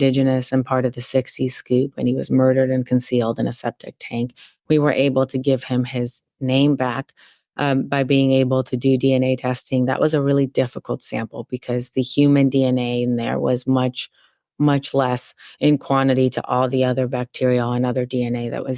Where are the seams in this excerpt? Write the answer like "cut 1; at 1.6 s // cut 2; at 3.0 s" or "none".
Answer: none